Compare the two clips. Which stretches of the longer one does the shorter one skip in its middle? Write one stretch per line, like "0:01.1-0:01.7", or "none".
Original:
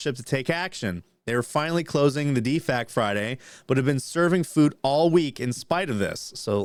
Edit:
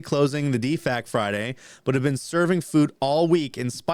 none